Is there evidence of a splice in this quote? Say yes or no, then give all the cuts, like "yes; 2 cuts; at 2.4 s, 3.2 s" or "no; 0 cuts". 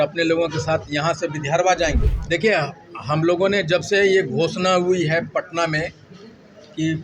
yes; 1 cut; at 2.1 s